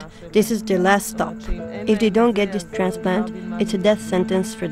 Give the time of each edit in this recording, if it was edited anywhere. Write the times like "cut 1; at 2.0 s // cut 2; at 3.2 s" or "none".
none

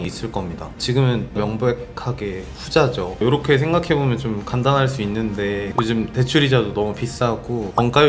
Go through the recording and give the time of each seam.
cut 1; at 3.1 s

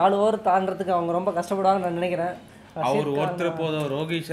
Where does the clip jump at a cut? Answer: cut 1; at 2.5 s

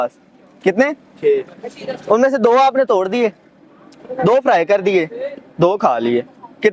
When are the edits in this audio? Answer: none

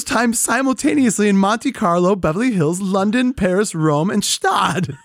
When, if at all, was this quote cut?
none

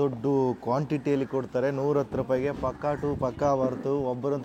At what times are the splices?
none

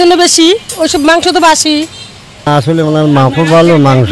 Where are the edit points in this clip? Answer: cut 1; at 2.5 s

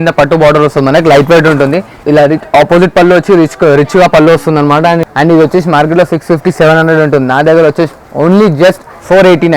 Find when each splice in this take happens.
cut 1; at 1.9 s // cut 2; at 5.1 s

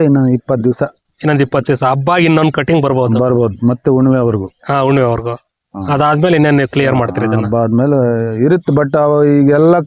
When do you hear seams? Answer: none

